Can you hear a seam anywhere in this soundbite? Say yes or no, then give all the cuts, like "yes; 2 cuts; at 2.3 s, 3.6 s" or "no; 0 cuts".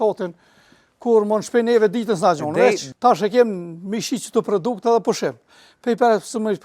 yes; 1 cut; at 2.8 s